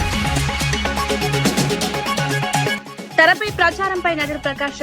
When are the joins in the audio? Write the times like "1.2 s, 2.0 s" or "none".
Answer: 0.9 s, 2.3 s